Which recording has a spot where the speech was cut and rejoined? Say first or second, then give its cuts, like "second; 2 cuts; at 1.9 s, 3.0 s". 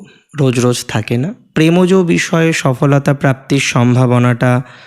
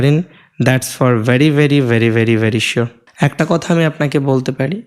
second; 1 cut; at 3.0 s